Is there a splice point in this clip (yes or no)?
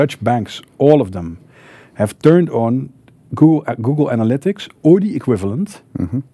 no